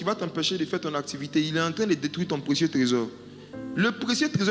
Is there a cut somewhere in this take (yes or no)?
no